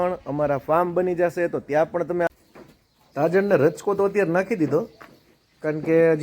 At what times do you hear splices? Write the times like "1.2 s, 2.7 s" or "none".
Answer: 2.3 s